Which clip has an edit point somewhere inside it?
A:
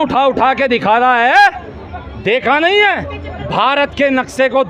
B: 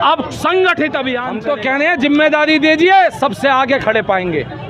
B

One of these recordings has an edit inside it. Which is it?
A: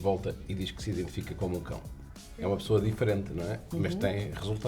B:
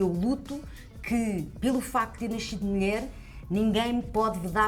A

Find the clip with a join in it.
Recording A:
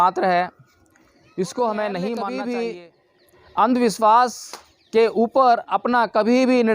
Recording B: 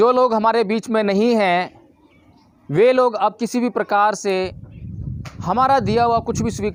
A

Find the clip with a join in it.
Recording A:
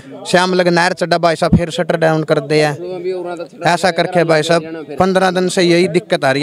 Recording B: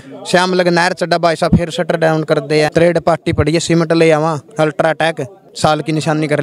B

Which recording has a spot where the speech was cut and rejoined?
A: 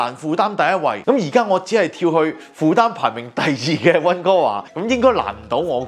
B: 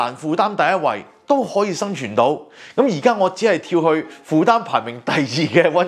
A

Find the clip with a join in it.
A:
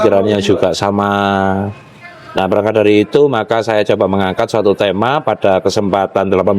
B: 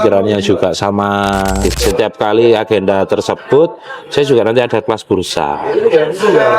B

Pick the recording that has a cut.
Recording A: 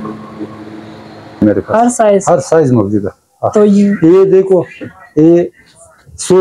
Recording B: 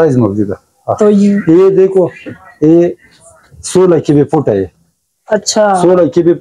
A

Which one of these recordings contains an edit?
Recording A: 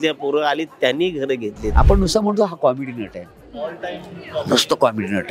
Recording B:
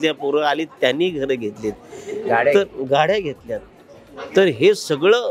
A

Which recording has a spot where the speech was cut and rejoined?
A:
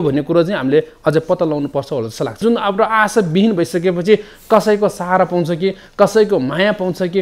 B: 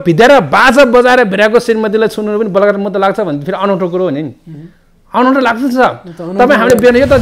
A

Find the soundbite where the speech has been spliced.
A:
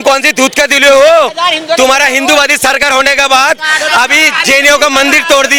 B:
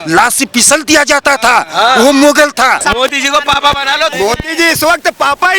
B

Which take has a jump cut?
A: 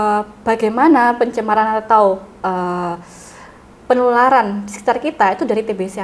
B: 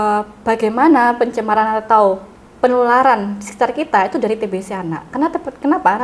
B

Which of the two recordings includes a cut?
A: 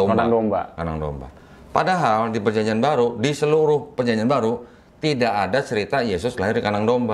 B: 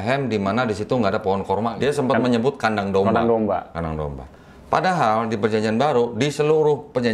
B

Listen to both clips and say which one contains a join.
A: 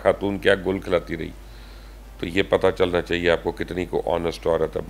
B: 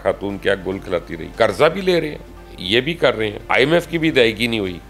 B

